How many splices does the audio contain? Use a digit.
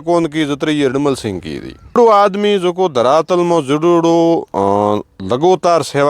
1